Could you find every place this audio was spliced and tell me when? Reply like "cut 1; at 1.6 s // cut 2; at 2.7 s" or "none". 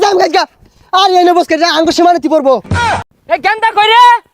cut 1; at 3.0 s